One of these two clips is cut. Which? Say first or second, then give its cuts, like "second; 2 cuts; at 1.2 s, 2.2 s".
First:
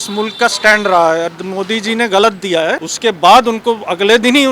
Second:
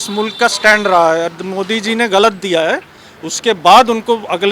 first; 1 cut; at 2.9 s